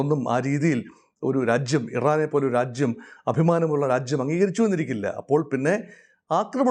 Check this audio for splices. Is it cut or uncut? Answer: uncut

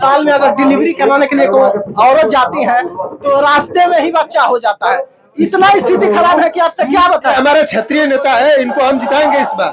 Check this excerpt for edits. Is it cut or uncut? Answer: cut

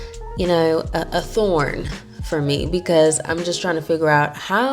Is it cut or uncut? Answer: uncut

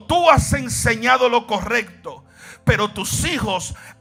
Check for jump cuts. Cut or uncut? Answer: uncut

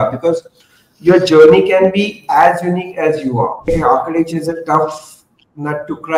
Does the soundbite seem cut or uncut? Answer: cut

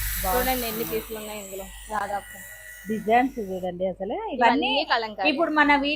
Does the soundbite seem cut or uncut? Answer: uncut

